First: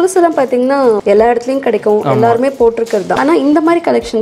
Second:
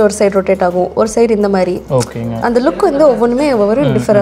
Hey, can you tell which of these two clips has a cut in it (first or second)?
first